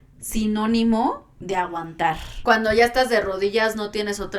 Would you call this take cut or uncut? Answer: cut